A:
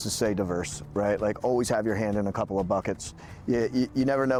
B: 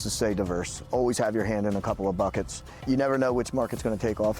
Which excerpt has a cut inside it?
B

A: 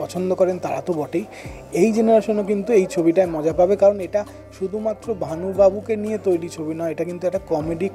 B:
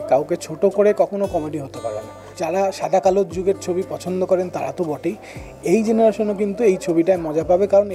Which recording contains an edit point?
B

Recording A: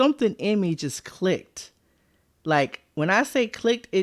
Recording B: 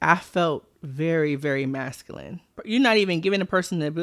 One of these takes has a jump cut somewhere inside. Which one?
B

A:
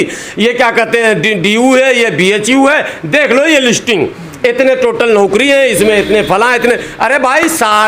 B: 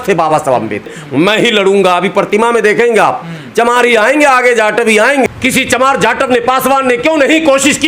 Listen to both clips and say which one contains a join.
B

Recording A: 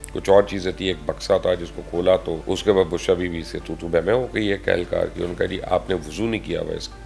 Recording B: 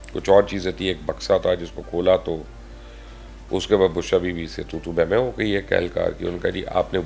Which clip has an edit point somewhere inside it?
A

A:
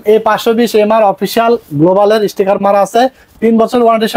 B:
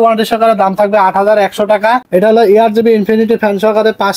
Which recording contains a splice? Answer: B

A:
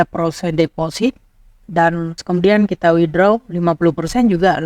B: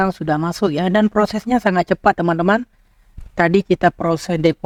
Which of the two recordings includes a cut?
A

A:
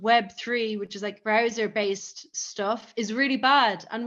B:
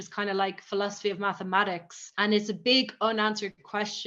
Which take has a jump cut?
A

